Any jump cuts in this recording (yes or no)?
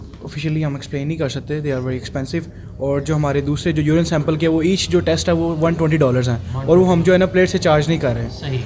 no